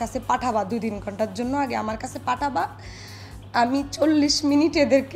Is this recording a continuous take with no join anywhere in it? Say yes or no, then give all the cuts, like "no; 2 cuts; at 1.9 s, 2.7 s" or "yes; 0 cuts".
yes; 0 cuts